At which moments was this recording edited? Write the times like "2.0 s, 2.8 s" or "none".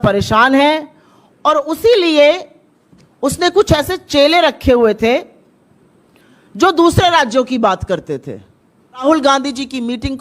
9.1 s